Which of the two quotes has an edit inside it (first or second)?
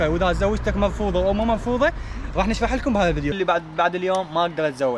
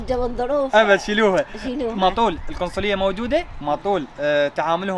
first